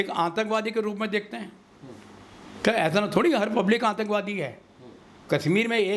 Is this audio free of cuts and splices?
yes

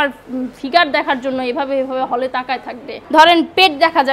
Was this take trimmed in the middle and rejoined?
yes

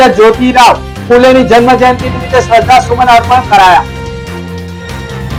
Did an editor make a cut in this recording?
no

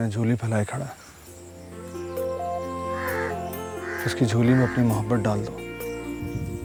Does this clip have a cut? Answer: no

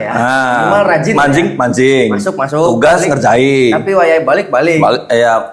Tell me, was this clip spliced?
no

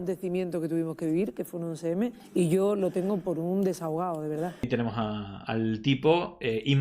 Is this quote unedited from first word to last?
no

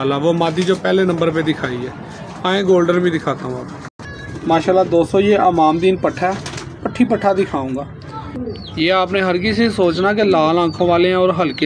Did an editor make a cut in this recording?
yes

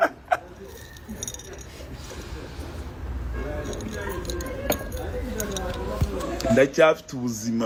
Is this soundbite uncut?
yes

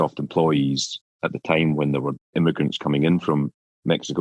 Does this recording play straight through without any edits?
no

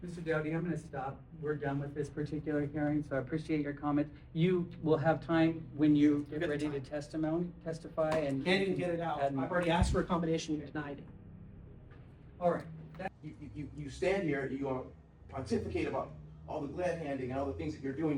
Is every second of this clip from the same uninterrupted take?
no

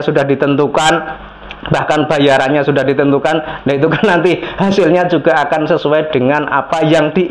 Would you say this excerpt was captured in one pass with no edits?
yes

